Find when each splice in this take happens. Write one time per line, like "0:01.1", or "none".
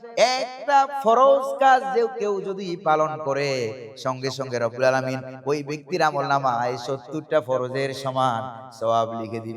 none

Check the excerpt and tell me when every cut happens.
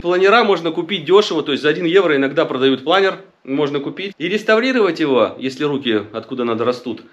0:04.0

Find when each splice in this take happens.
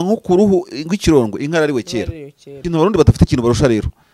0:02.6

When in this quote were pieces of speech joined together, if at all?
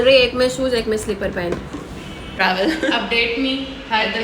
0:02.3

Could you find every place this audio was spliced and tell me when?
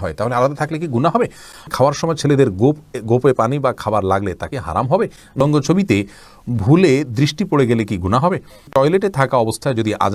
0:01.6
0:05.4
0:08.6

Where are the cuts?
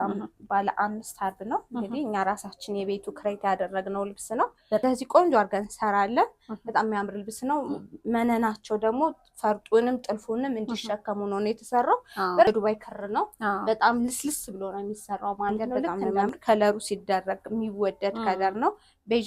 0:04.8
0:12.5
0:16.0

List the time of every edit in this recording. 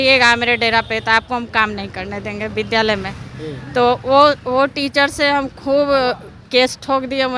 none

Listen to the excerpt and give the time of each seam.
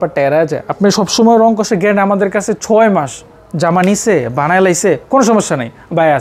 none

